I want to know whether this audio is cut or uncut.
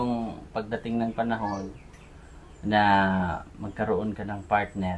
uncut